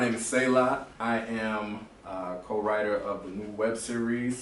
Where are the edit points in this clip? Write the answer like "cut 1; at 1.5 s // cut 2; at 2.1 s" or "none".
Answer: cut 1; at 0.9 s